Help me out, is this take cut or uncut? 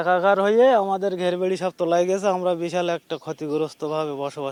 uncut